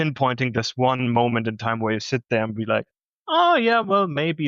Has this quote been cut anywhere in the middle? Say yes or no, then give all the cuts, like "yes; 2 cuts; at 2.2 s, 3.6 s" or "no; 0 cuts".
no; 0 cuts